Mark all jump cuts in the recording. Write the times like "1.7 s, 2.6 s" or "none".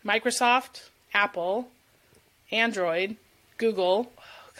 none